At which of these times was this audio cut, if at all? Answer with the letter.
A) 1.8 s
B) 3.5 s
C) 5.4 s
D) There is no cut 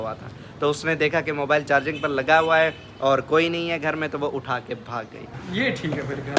C